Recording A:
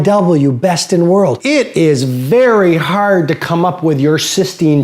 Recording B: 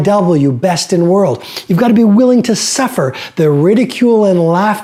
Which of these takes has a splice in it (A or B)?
A